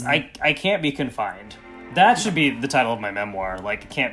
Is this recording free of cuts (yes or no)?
yes